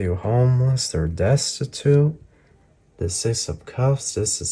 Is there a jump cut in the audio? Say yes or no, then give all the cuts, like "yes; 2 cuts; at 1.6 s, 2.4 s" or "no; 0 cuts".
no; 0 cuts